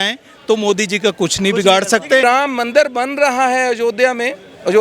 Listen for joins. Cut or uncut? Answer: cut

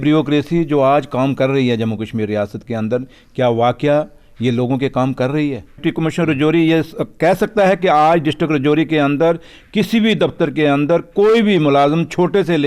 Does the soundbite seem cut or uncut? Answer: cut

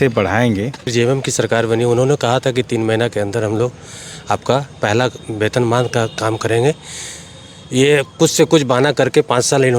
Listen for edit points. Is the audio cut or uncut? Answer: cut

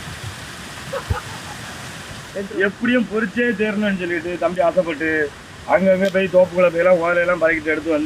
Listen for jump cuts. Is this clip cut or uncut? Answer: uncut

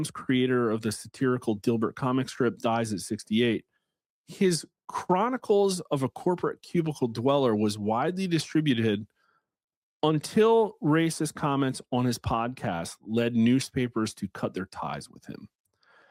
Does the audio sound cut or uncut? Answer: uncut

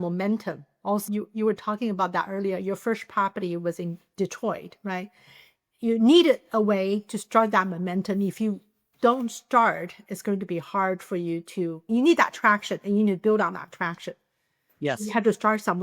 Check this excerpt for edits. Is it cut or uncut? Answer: uncut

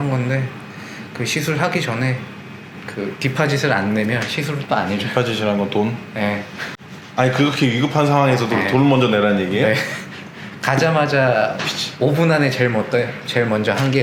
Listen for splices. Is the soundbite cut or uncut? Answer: uncut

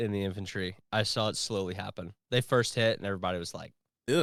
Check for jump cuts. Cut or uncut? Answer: uncut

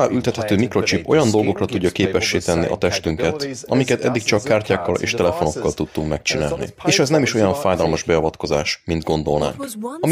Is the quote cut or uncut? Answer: cut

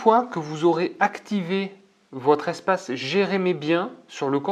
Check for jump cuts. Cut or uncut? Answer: uncut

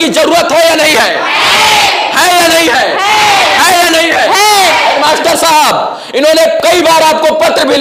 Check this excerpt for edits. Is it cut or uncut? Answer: uncut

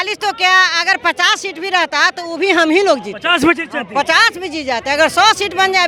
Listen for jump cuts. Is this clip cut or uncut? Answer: uncut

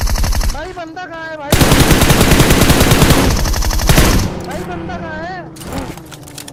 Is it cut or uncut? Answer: uncut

